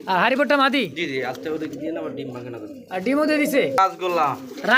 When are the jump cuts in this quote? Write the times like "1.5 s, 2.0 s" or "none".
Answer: 3.8 s